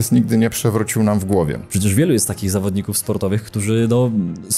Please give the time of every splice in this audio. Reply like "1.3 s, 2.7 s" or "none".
1.6 s